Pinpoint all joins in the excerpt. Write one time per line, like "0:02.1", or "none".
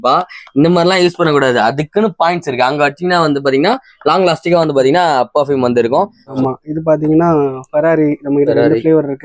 0:06.2